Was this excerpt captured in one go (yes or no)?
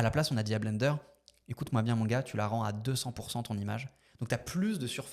yes